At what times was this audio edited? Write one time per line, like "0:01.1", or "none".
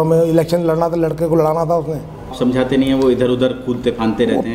0:02.3